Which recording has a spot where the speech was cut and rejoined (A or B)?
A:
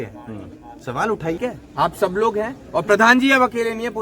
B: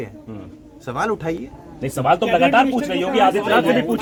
A